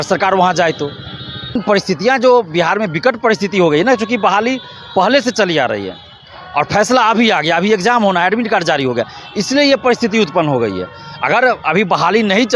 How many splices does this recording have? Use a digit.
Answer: 1